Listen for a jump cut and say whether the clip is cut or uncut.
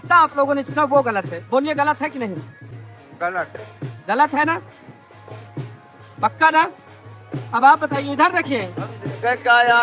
uncut